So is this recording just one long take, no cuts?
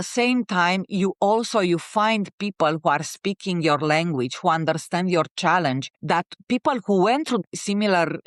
yes; 0 cuts

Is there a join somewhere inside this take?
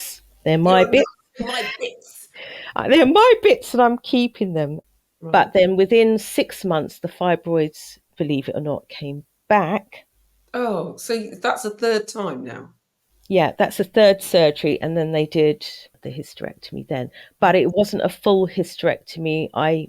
yes; 2 cuts; at 4.8 s, 15.9 s

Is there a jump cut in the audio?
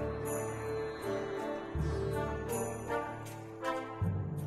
no; 0 cuts

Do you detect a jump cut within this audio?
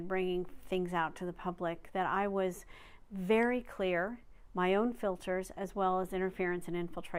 no; 0 cuts

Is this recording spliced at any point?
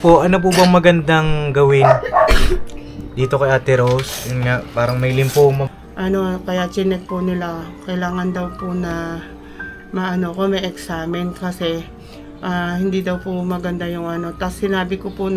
yes; 1 cut; at 5.7 s

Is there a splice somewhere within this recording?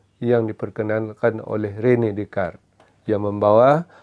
no; 0 cuts

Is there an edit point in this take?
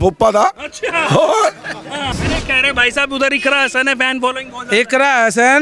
yes; 1 cut; at 2.1 s

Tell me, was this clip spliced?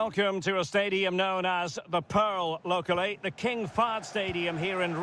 no; 0 cuts

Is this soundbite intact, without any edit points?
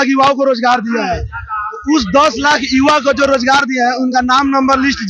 yes; 0 cuts

